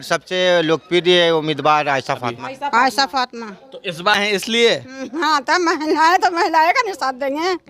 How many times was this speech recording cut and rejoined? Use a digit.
1